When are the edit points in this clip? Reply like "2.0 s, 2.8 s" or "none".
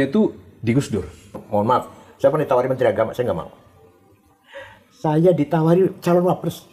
1.4 s